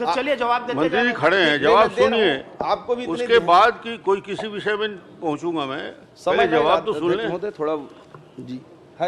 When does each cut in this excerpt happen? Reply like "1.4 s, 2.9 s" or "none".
none